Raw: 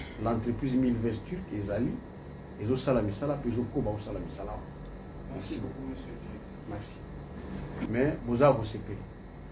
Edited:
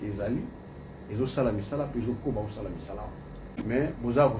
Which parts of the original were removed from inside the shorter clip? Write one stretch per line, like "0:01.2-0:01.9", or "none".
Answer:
0:05.0-0:07.7